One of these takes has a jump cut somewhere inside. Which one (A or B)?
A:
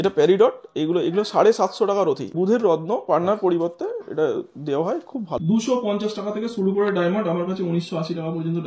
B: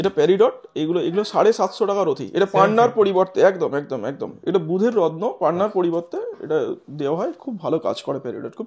A